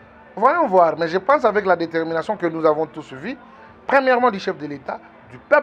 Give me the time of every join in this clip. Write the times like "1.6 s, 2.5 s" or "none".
none